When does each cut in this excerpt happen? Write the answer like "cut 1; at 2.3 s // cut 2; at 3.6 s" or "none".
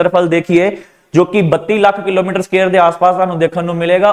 none